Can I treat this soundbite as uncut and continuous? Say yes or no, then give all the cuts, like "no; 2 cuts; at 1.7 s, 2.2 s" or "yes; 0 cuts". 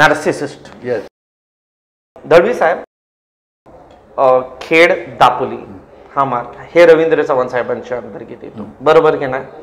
yes; 0 cuts